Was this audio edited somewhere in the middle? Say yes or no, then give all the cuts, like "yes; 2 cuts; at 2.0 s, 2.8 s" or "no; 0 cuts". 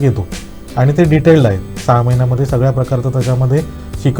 no; 0 cuts